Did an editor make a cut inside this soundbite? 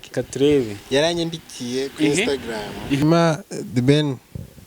yes; 1 cut; at 3.0 s

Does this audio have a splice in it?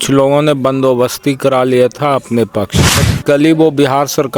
yes; 1 cut; at 3.1 s

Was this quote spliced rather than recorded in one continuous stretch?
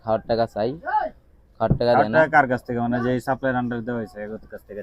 no; 0 cuts

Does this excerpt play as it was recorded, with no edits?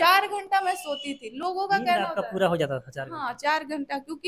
yes; 0 cuts

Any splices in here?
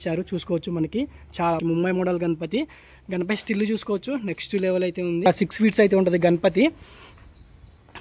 yes; 2 cuts; at 1.6 s, 5.3 s

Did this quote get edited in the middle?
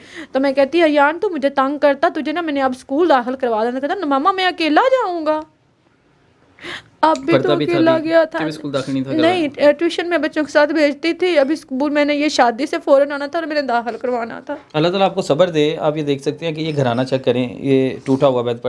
no; 0 cuts

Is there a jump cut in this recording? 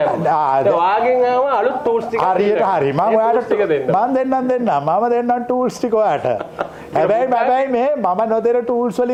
no; 0 cuts

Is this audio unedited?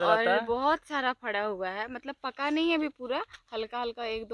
yes; 0 cuts

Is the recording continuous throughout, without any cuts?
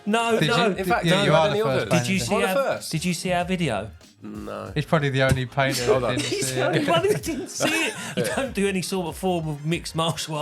no; 1 cut; at 8.1 s

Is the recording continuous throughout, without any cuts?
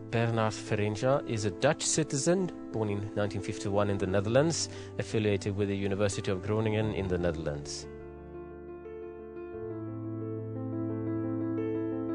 yes; 0 cuts

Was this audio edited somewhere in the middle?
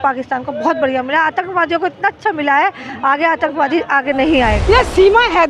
yes; 1 cut; at 4.6 s

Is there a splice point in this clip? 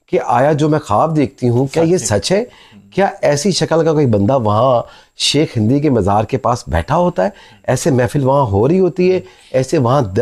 no; 0 cuts

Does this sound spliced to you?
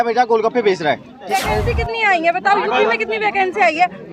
yes; 1 cut; at 1.2 s

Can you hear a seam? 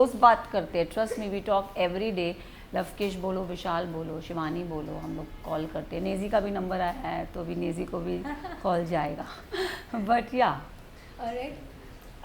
no; 0 cuts

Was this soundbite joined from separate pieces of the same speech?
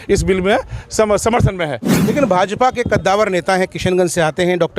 yes; 1 cut; at 1.9 s

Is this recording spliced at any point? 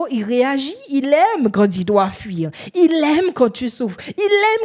no; 0 cuts

